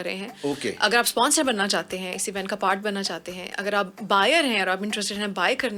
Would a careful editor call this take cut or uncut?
uncut